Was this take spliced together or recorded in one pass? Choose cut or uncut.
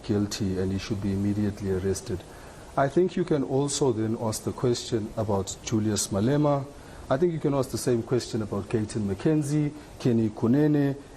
uncut